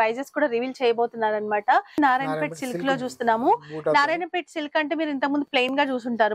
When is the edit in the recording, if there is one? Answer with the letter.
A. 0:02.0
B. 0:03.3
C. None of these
A